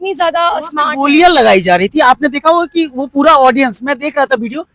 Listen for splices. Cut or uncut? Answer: uncut